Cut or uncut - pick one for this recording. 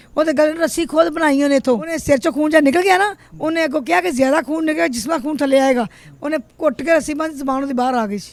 uncut